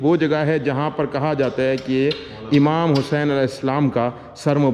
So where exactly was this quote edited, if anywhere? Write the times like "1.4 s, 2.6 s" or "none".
none

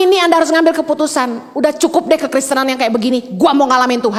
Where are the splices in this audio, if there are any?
none

